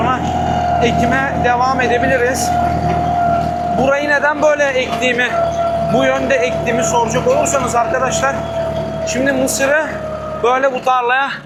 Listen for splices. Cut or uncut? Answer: uncut